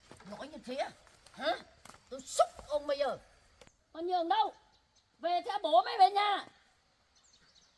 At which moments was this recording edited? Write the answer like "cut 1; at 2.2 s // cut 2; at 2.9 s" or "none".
none